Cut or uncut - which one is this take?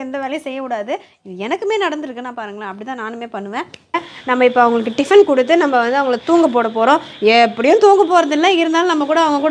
cut